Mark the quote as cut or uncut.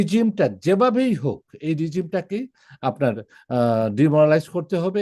uncut